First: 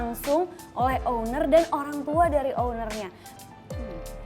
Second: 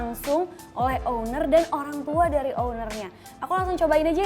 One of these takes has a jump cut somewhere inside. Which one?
first; 1 cut; at 3.2 s

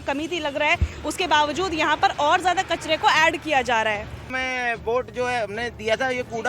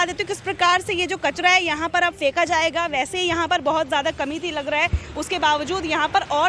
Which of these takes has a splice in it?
first; 1 cut; at 4.3 s

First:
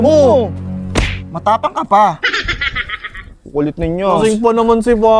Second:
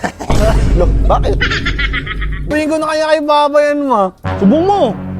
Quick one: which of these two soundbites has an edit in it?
second; 1 cut; at 2.5 s

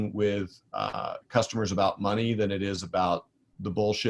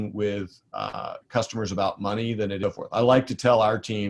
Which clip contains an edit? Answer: second; 1 cut; at 2.6 s

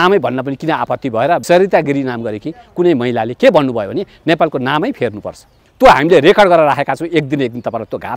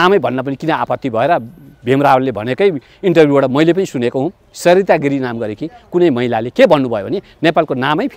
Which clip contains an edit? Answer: first; 2 cuts; at 1.4 s, 5.6 s

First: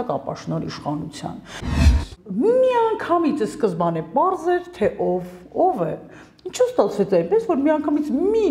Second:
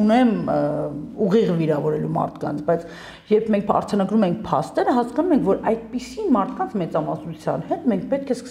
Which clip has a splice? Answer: first; 1 cut; at 1.8 s

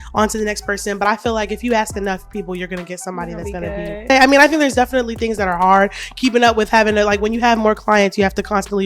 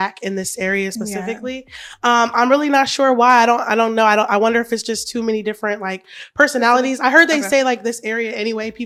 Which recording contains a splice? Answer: first; 1 cut; at 4.1 s

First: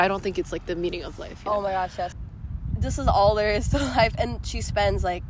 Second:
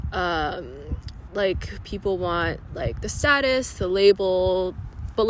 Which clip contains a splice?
first; 1 cut; at 2.1 s

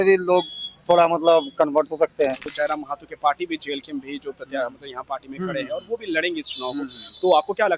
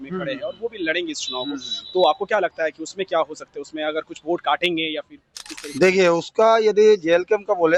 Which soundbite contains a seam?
first; 1 cut; at 2.5 s

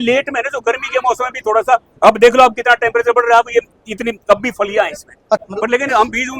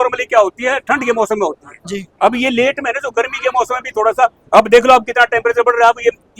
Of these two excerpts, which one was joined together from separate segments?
first; 1 cut; at 5.4 s

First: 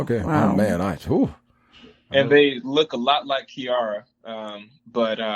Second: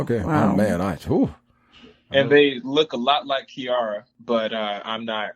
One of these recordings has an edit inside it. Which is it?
second; 1 cut; at 4.1 s

